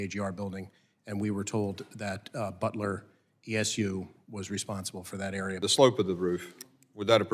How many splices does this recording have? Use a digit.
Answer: 1